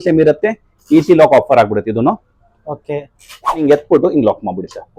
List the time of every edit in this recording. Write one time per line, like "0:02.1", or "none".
0:03.6